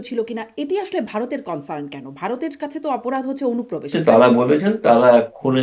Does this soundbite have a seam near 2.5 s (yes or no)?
no